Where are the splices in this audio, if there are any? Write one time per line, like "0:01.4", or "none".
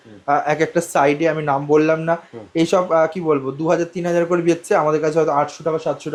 none